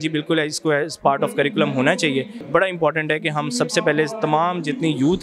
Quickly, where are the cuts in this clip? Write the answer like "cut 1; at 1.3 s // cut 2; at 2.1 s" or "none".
cut 1; at 2.4 s